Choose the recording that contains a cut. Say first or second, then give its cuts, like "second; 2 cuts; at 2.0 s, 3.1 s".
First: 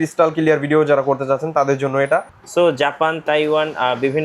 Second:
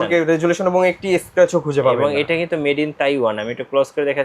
first; 1 cut; at 2.4 s